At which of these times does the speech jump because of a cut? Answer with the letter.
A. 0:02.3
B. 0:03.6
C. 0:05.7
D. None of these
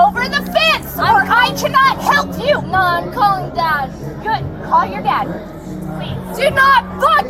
D